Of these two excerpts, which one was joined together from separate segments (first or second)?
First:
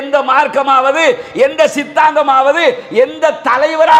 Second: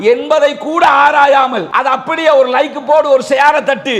second